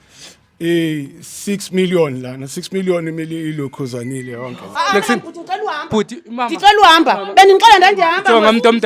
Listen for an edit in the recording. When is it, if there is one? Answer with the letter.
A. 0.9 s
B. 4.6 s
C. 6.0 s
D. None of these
B